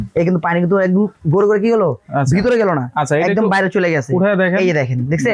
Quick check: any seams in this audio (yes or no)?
no